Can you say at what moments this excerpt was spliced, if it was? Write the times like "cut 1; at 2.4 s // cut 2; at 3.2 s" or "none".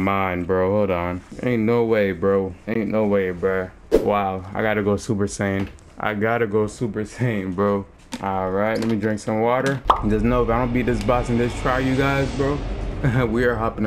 cut 1; at 1.3 s // cut 2; at 2.6 s // cut 3; at 3.8 s // cut 4; at 5.8 s // cut 5; at 8.0 s // cut 6; at 9.9 s